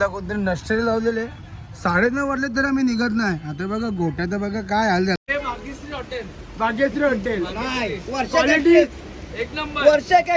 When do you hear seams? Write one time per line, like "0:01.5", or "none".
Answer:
0:05.3